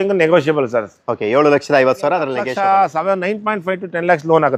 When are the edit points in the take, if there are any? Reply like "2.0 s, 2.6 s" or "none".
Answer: 2.4 s

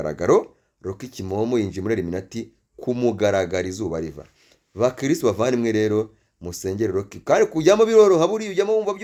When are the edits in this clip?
none

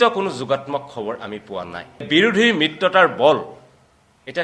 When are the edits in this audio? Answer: 2.1 s

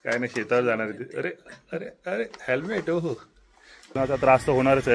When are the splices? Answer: 4.0 s

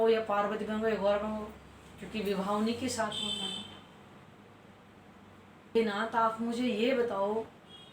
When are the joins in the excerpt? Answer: 5.7 s

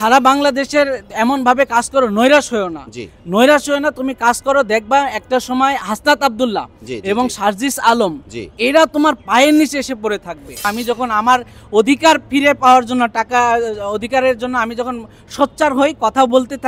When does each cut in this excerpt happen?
10.6 s

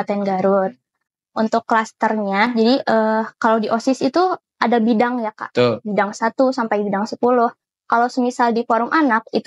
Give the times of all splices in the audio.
none

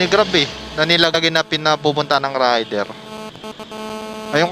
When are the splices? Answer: 1.1 s

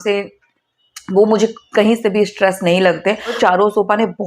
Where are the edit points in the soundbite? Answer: 3.4 s

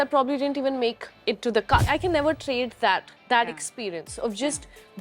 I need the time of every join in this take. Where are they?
1.9 s

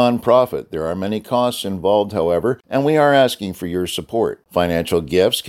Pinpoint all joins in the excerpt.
2.6 s

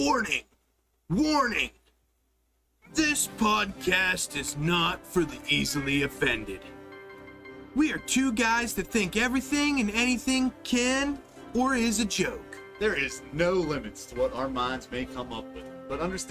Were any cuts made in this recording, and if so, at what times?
1.3 s

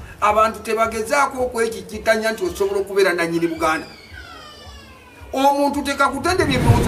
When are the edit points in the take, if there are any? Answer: none

